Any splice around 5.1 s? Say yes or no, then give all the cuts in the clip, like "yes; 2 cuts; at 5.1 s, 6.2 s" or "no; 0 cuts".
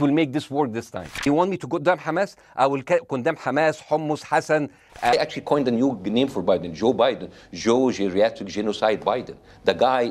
yes; 2 cuts; at 1.3 s, 5.1 s